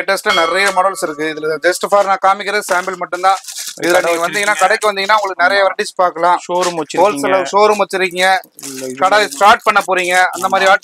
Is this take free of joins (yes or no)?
yes